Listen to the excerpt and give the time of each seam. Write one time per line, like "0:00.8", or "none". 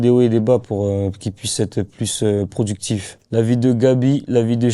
0:03.3